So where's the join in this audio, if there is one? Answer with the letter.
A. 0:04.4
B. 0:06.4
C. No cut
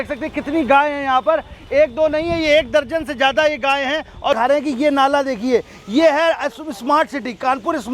A